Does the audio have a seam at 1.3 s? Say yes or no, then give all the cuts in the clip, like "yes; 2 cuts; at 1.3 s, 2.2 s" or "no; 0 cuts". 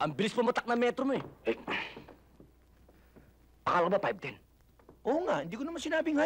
yes; 1 cut; at 1.3 s